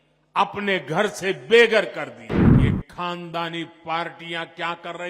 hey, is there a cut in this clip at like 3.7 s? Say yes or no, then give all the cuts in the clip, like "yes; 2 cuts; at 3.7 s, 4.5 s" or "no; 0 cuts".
no; 1 cut; at 2.4 s